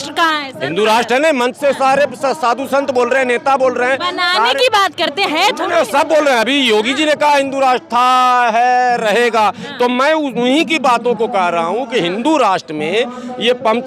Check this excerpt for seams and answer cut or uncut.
uncut